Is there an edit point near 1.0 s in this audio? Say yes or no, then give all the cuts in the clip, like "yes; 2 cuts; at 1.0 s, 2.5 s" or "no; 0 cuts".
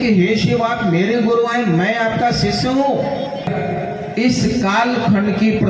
no; 1 cut; at 3.5 s